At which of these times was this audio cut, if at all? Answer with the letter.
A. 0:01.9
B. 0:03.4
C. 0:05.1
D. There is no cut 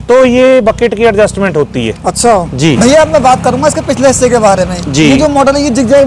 D